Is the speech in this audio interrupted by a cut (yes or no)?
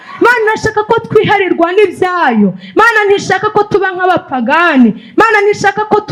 no